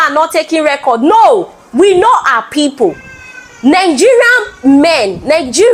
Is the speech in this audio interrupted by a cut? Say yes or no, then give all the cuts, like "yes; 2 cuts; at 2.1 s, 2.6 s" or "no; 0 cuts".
no; 0 cuts